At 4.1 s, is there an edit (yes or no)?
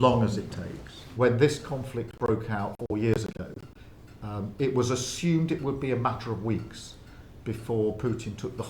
no